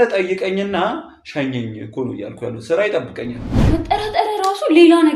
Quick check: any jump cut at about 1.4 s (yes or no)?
no